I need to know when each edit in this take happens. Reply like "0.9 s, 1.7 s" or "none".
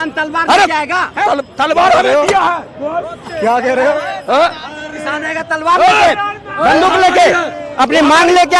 none